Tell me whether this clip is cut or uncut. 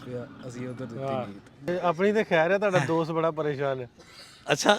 cut